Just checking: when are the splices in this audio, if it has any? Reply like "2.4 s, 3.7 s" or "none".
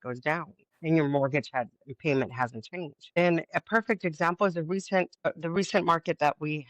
5.3 s